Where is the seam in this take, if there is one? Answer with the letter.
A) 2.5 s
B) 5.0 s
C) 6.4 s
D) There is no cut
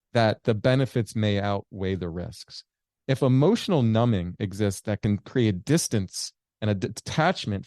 B